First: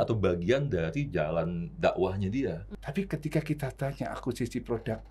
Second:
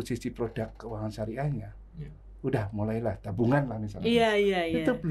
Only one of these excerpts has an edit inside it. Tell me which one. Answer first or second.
first